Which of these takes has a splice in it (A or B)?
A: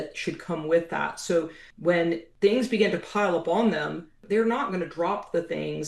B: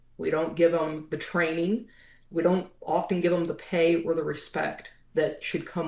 A